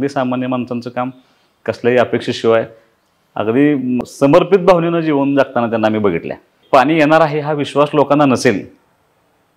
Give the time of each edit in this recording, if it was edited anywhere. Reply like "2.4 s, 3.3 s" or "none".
4.0 s, 6.6 s

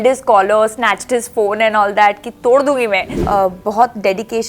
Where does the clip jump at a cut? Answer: 3.1 s

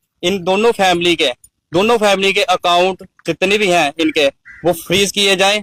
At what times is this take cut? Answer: none

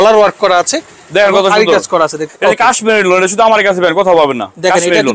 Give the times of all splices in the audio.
2.2 s

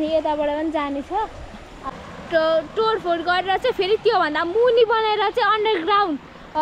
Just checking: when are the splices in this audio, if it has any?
1.7 s

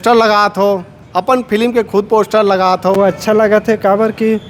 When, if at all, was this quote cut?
3.0 s

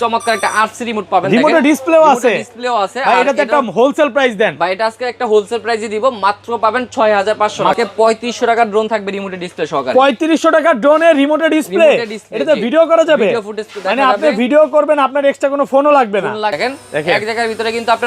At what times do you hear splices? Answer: 7.8 s, 16.6 s

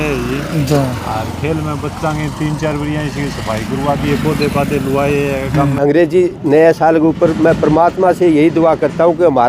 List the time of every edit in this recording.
5.7 s

